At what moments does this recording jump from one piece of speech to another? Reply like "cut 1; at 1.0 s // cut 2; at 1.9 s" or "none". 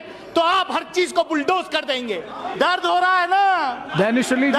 cut 1; at 2.4 s